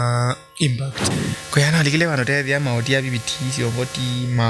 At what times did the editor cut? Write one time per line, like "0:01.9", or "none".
0:00.9